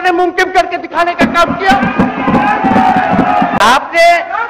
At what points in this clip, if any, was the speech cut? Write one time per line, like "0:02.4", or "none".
none